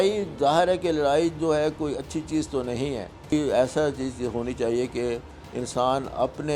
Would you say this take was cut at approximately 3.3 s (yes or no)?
yes